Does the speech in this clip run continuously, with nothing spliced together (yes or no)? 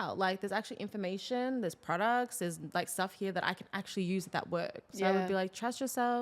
no